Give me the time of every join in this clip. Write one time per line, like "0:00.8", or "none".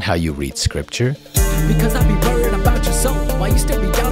0:01.2